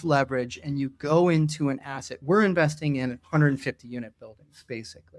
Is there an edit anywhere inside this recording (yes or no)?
no